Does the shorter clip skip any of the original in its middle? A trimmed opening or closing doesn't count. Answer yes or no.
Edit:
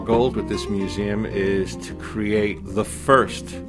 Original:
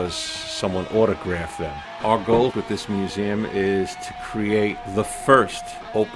no